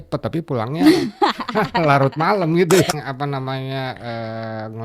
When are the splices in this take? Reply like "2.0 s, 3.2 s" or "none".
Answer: 2.9 s

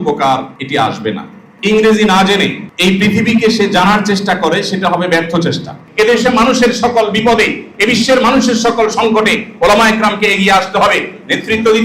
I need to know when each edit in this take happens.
1.1 s, 2.6 s, 5.8 s

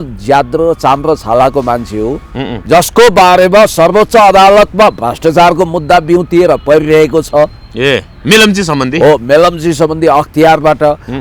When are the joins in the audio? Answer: 2.5 s

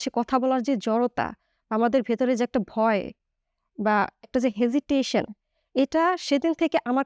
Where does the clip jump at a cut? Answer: none

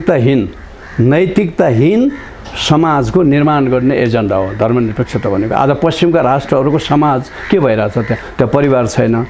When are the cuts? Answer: none

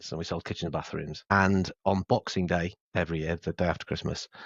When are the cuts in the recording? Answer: 2.8 s

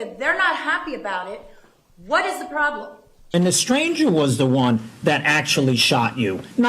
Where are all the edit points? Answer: 3.3 s

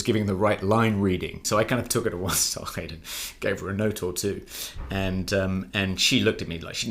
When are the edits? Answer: 1.4 s

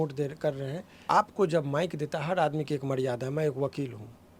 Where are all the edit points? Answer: 1.0 s

